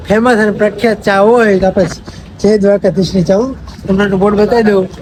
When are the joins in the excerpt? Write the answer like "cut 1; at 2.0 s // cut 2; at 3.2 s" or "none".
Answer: none